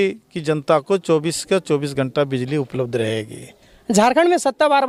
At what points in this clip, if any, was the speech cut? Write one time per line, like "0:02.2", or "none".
none